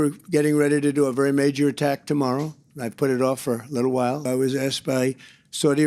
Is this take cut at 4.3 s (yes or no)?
yes